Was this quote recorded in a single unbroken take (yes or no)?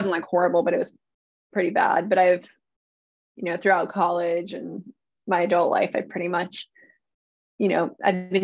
yes